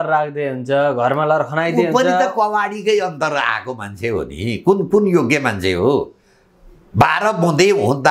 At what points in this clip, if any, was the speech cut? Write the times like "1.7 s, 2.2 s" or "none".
none

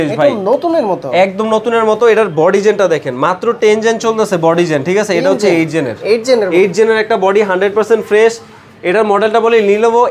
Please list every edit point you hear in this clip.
none

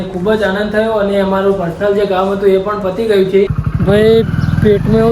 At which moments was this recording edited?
3.6 s

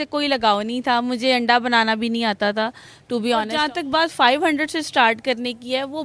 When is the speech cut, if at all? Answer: 3.5 s

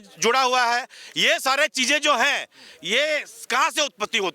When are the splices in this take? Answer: none

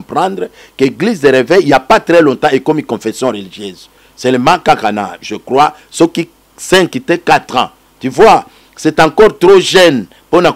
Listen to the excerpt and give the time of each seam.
none

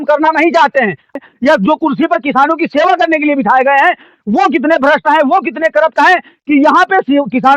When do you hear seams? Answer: 1.2 s

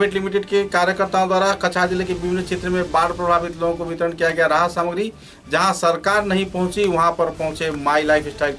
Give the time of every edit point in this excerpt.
none

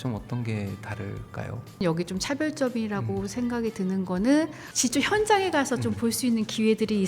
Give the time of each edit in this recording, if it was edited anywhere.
1.8 s

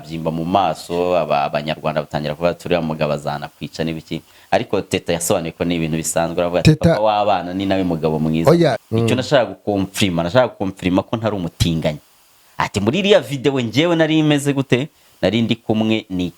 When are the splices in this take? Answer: 8.8 s

